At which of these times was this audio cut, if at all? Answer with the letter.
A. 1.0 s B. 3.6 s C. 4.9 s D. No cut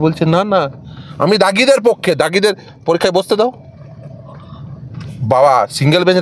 D